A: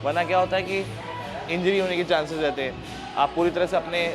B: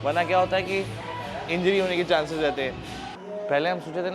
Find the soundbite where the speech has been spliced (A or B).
B